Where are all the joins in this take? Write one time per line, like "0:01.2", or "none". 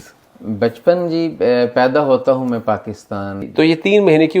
0:03.4